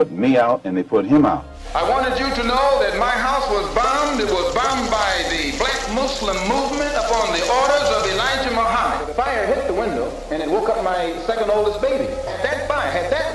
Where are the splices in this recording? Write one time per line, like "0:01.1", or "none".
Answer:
0:01.6
0:09.1
0:12.4